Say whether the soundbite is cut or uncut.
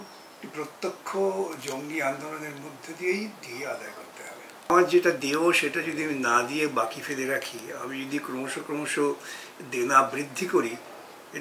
cut